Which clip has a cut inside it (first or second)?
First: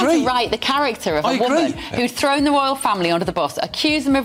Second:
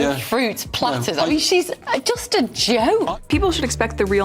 second